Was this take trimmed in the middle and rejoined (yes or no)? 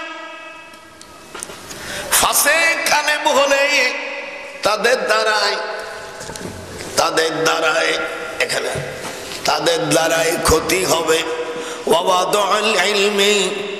no